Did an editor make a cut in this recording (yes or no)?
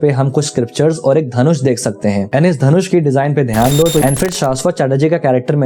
yes